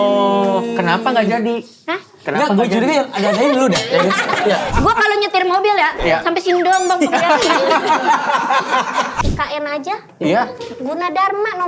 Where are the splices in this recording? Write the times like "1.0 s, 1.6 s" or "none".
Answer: 4.7 s, 9.2 s